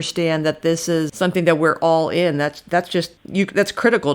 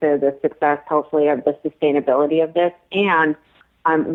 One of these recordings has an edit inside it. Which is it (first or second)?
first